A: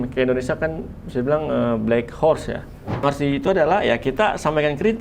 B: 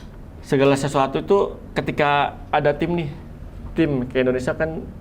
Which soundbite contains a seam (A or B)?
A